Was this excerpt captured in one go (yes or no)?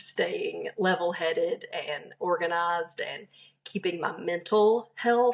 yes